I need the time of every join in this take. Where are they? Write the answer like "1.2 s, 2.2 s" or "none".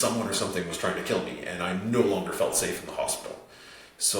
none